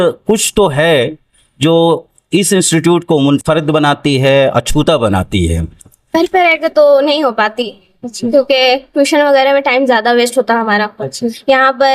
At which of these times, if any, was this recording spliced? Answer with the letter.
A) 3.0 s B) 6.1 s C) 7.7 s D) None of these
B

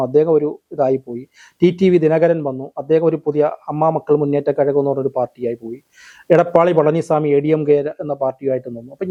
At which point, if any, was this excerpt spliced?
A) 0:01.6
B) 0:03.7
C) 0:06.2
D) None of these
D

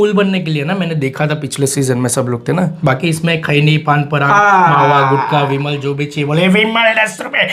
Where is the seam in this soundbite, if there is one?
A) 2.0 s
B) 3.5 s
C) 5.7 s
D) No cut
D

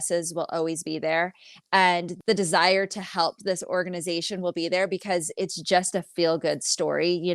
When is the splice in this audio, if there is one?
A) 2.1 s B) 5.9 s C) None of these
A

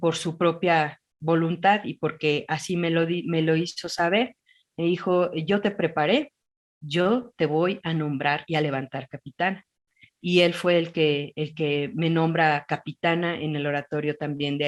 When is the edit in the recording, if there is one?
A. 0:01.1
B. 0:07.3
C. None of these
C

